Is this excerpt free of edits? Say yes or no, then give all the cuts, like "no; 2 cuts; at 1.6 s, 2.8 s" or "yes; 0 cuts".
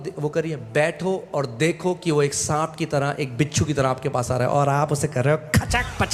yes; 0 cuts